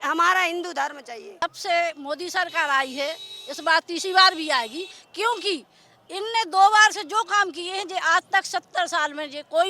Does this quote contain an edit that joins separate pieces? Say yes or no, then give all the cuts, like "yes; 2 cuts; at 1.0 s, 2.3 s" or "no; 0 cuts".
yes; 1 cut; at 1.4 s